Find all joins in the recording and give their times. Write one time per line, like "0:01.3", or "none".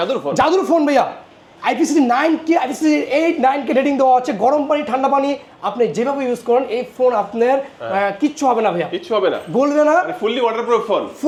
none